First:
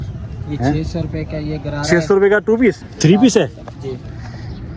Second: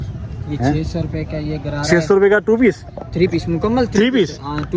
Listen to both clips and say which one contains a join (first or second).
first